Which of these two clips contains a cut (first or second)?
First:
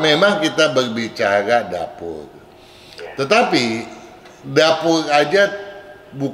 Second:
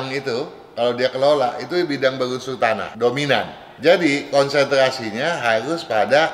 second